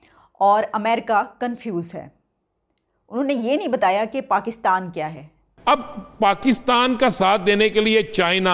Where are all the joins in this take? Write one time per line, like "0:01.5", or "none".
0:05.5